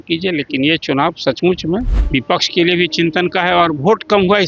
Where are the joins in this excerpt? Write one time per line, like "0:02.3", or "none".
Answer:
0:02.0